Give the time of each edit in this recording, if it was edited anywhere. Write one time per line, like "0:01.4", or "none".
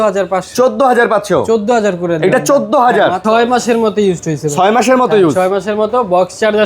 0:03.2